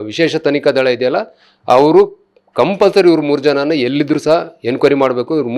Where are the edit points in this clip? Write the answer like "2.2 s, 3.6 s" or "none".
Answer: none